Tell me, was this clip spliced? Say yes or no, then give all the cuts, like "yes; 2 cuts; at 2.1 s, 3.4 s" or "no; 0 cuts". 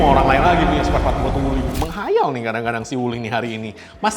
no; 0 cuts